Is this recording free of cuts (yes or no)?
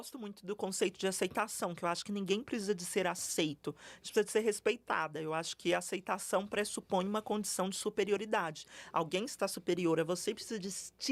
yes